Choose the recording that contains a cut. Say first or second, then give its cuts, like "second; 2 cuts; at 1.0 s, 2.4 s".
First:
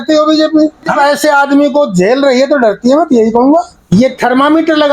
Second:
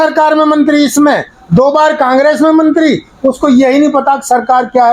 first; 2 cuts; at 0.9 s, 3.8 s